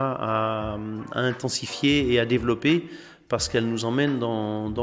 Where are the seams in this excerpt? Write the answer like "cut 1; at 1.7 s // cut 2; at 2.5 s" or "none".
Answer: none